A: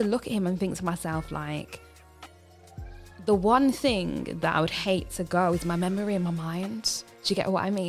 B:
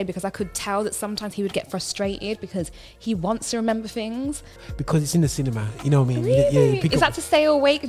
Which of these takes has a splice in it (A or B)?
B